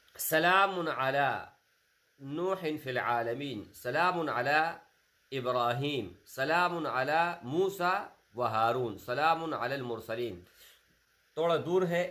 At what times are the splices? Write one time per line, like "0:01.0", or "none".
none